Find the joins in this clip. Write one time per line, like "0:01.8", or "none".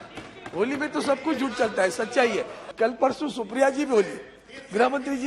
0:02.6